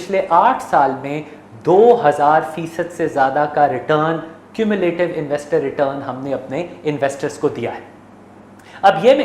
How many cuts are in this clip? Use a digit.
0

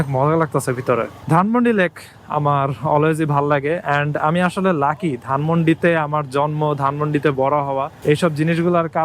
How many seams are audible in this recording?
1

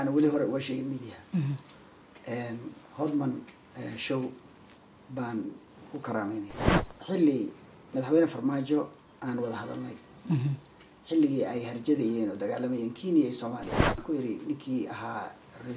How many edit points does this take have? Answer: 2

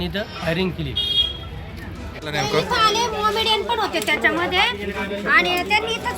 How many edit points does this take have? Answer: 1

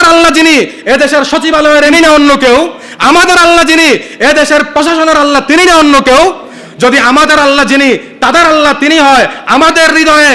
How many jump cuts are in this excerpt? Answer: 1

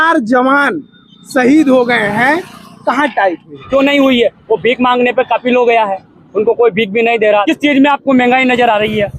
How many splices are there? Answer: 2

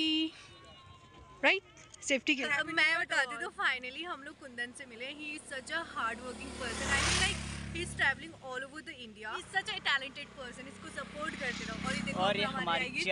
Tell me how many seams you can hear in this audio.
2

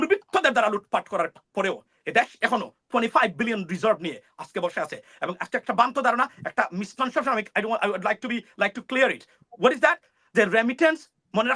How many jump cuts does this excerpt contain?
0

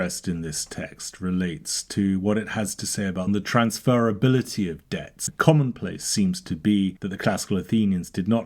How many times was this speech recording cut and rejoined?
2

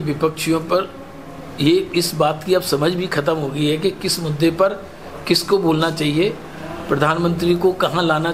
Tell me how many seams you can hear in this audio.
0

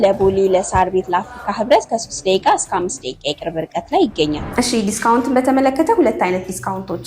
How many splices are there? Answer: 1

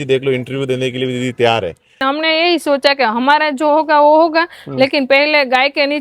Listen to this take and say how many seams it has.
1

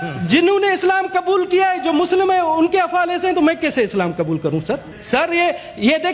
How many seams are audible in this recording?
1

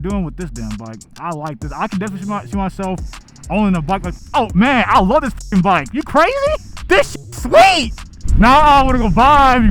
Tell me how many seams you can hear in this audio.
2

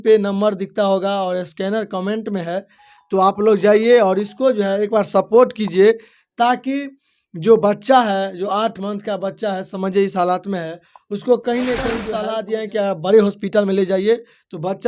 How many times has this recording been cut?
1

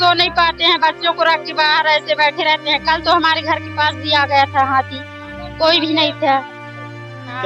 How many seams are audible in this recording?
0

